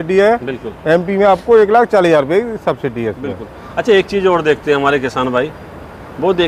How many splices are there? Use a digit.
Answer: 0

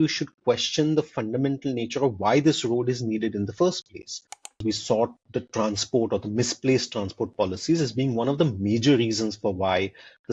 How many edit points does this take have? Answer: 2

